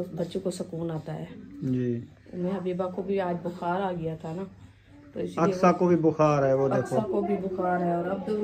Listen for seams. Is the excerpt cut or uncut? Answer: uncut